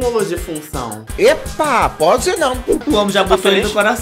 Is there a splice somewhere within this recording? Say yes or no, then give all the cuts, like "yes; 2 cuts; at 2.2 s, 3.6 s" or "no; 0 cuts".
yes; 1 cut; at 2.7 s